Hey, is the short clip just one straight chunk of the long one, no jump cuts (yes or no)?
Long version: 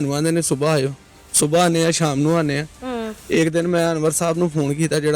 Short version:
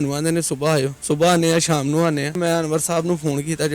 no